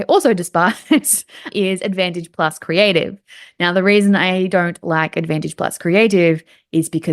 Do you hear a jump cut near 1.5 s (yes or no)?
yes